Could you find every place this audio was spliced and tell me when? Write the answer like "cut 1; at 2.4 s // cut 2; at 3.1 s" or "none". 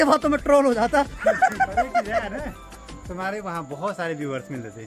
none